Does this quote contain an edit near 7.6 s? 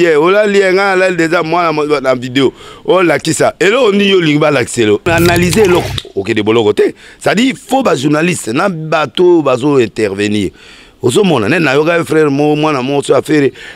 no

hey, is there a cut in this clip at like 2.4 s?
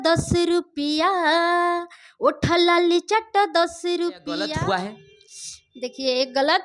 no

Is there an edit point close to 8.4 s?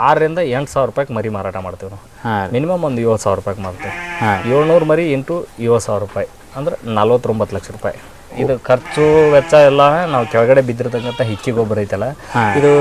yes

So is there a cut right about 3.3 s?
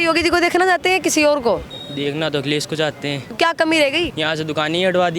yes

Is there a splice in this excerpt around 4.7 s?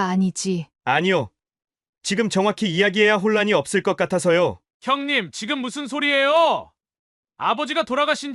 yes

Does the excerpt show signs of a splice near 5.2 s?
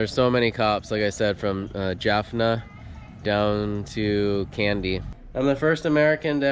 yes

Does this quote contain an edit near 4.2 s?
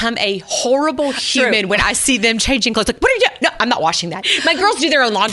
yes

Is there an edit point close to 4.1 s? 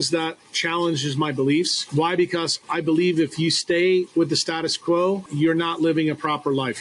no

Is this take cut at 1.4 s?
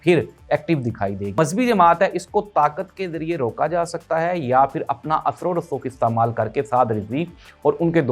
yes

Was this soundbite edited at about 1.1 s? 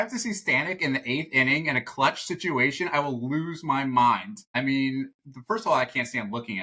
no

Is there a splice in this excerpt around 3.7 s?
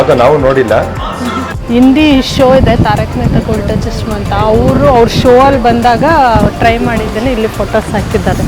no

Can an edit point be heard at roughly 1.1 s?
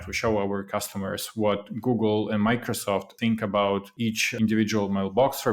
no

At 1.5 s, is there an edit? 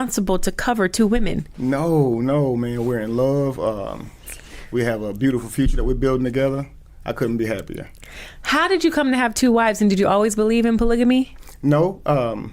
yes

